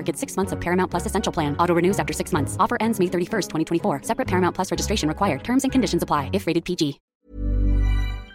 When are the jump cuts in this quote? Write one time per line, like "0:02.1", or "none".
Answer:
0:07.1

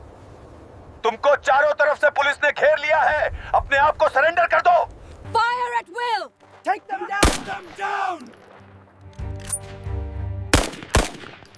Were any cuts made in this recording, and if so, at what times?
0:05.1

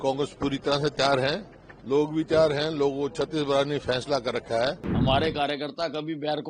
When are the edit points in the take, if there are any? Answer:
0:04.9

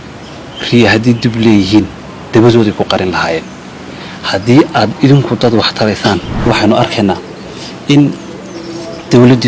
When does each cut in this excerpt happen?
0:06.5

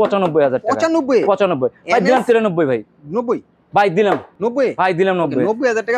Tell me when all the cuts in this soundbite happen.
none

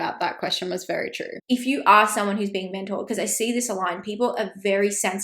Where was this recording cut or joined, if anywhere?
0:01.3

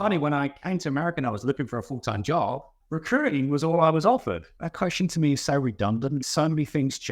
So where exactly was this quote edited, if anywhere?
0:04.5
0:06.2

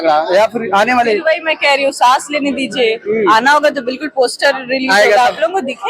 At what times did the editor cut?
none

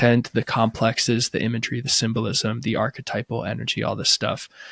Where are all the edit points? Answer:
none

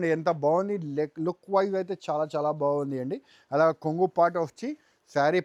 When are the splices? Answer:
none

